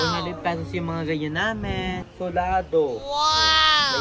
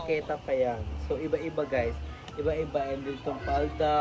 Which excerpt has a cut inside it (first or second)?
first